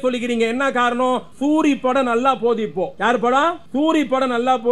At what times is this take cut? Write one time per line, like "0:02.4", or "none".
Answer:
0:01.3
0:02.9
0:03.6